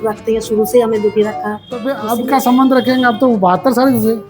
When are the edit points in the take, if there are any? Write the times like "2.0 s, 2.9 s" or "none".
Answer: 1.3 s